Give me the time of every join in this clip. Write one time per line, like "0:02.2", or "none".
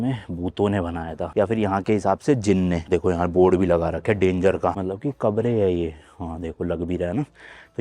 0:02.8
0:04.7